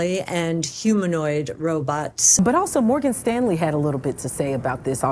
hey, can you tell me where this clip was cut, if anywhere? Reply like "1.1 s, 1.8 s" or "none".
2.3 s